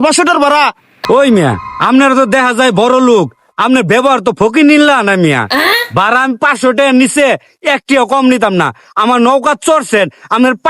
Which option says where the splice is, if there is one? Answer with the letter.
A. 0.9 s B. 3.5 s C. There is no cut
A